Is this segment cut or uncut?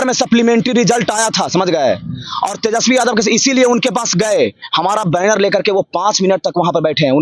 uncut